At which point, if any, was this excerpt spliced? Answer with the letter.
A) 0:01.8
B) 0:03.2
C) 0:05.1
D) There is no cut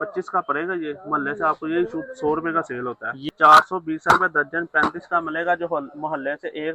B